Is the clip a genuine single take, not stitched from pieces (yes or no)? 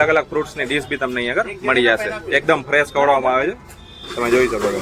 yes